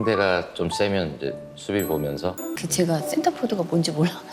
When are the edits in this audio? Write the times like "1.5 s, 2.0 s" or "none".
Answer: 2.6 s